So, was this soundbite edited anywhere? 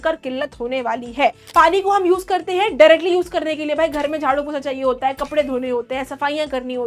yes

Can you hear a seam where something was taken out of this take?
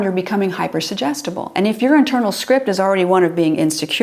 no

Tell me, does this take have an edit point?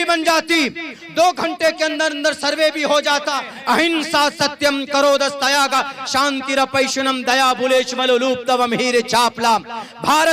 yes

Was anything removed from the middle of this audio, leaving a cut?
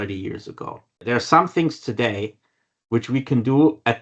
yes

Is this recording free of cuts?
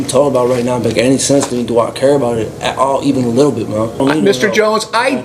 no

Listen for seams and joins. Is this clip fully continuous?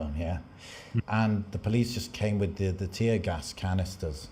no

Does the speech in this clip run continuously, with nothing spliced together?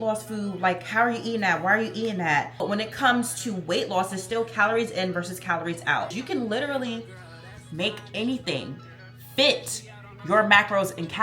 no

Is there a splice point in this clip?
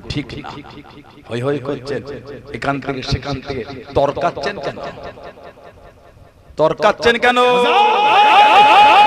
yes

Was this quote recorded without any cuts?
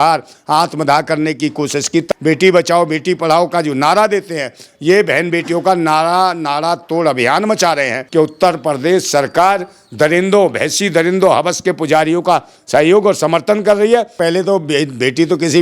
no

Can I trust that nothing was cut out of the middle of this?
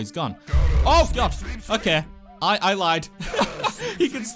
yes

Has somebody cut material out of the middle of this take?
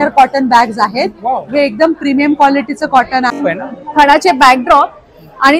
yes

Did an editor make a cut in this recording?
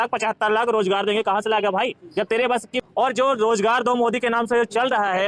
yes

